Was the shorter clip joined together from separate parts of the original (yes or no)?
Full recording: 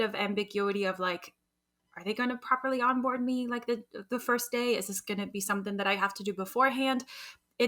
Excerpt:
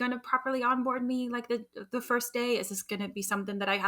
no